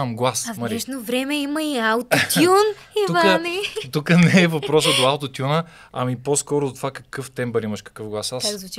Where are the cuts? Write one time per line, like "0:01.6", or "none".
none